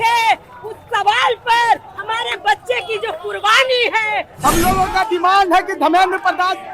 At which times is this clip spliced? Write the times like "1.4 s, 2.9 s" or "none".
4.3 s